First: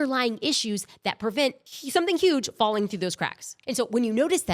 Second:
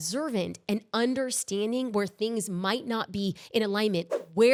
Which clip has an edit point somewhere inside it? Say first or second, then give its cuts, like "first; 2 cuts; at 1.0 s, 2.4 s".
first; 2 cuts; at 1.7 s, 3.5 s